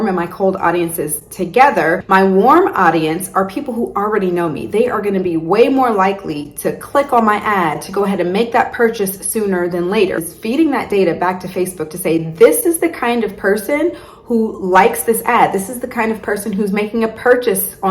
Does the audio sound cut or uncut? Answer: cut